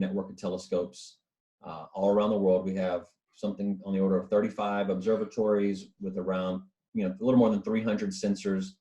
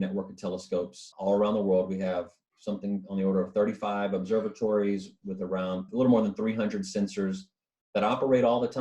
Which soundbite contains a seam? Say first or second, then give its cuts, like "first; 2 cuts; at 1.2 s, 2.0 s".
second; 2 cuts; at 1.0 s, 5.9 s